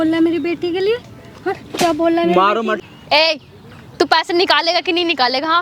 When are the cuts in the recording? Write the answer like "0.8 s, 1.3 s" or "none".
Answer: 2.8 s